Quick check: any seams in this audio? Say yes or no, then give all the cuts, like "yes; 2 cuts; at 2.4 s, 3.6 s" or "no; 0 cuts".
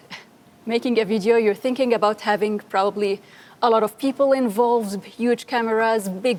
no; 0 cuts